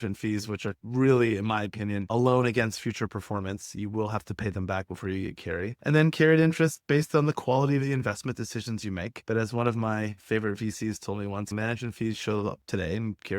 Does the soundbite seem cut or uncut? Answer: cut